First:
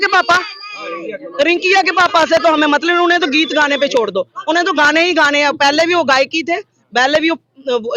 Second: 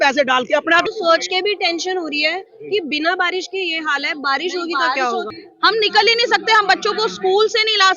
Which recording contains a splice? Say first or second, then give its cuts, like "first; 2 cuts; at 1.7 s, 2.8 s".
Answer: second; 2 cuts; at 0.9 s, 5.3 s